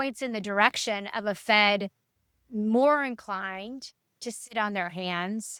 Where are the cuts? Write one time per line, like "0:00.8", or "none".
none

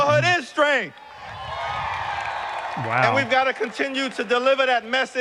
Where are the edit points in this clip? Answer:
none

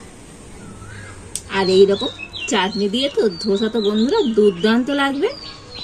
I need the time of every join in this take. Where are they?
0:01.5

